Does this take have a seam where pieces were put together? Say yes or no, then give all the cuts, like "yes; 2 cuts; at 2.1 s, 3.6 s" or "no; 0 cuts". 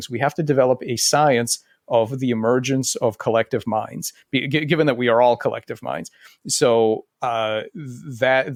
no; 0 cuts